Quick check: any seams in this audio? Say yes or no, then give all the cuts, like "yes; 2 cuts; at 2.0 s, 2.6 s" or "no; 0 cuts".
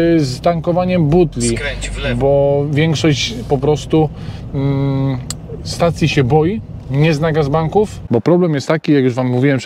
yes; 1 cut; at 8.0 s